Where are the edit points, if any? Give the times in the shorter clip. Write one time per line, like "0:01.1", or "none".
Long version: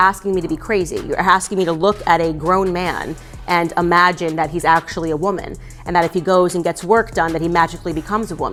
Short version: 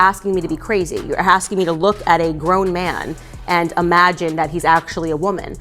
none